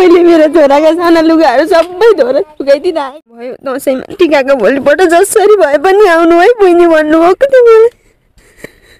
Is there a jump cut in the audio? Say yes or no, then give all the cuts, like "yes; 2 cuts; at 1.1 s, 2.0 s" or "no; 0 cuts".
yes; 1 cut; at 3.7 s